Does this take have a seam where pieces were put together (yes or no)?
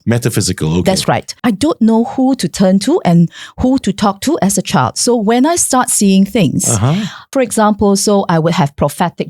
yes